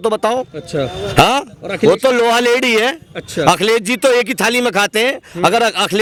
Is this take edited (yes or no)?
no